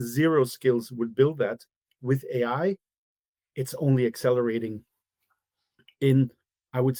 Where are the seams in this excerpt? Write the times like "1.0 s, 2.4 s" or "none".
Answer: none

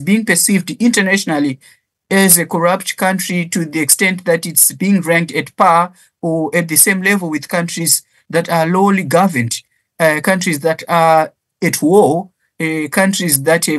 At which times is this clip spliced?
none

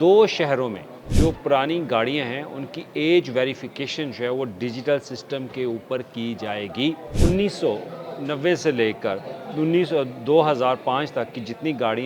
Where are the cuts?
1.1 s, 7.1 s

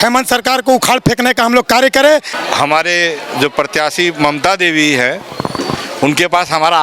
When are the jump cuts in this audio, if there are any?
2.3 s

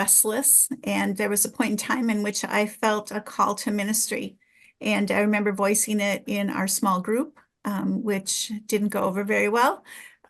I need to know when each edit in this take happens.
none

